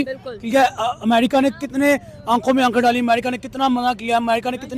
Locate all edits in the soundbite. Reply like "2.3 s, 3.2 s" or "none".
none